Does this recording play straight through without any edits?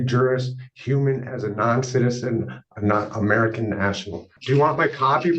no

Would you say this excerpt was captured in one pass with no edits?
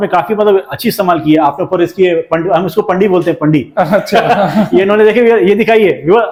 yes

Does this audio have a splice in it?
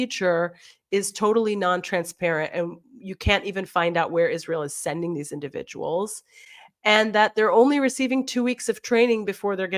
no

